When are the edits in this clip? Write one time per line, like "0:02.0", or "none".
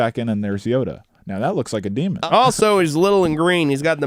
0:02.2